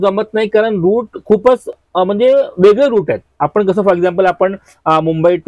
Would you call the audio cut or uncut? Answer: uncut